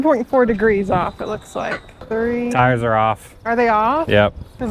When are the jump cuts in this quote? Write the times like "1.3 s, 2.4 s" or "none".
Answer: none